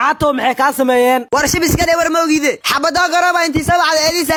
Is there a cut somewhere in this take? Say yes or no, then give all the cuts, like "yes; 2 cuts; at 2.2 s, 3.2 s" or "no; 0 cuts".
no; 0 cuts